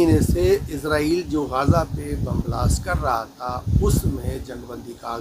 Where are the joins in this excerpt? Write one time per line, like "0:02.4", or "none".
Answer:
none